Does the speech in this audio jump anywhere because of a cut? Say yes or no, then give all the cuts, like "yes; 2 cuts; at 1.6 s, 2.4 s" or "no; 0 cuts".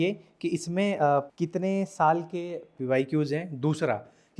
yes; 1 cut; at 1.4 s